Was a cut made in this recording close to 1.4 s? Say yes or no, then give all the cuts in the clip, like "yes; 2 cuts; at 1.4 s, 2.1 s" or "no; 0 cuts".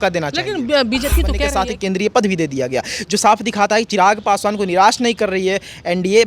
yes; 1 cut; at 1.4 s